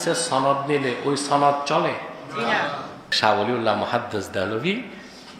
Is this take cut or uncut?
cut